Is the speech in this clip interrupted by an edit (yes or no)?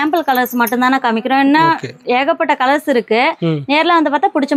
no